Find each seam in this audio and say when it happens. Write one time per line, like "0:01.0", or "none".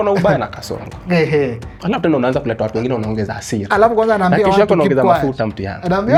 none